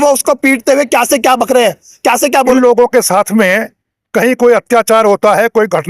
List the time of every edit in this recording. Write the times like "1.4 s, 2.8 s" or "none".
2.5 s